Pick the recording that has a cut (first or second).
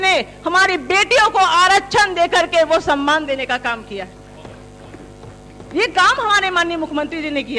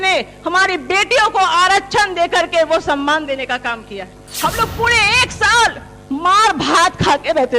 second